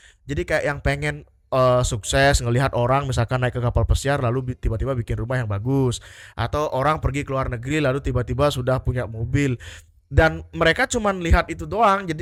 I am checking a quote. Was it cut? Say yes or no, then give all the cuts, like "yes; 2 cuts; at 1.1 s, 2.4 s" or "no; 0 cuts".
no; 0 cuts